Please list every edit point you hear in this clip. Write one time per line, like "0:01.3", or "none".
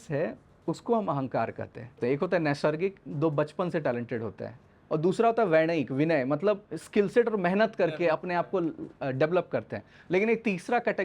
0:02.0